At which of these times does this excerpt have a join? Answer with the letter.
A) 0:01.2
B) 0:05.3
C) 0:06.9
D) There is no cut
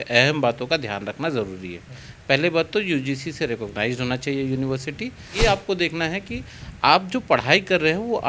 B